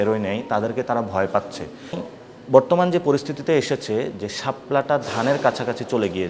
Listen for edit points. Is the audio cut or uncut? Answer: cut